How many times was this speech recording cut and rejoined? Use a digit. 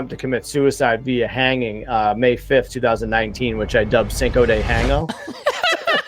1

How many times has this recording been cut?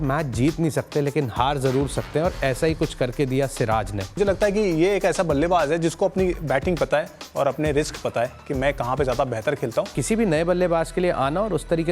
2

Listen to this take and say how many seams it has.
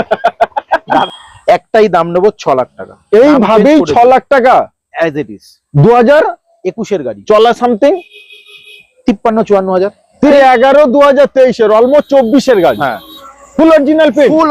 2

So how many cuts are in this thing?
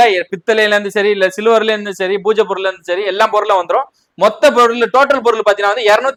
0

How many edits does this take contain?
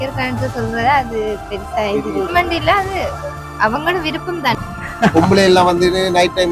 2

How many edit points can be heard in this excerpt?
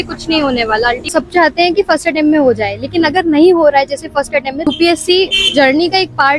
2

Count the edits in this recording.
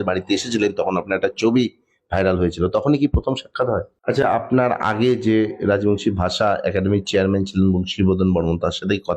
1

